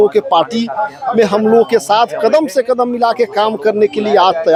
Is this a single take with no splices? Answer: yes; 0 cuts

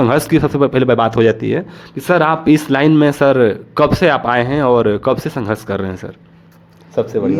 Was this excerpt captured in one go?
yes; 0 cuts

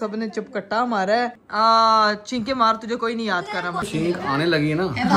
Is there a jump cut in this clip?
yes; 1 cut; at 1.4 s

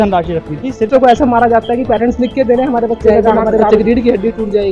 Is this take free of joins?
no; 2 cuts; at 0.9 s, 3.4 s

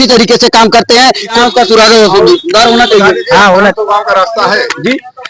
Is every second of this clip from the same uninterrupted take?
no; 1 cut; at 1.3 s

